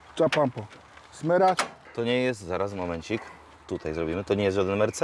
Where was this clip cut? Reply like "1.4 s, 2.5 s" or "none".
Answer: 1.8 s